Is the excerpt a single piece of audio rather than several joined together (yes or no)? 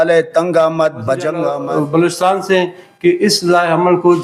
no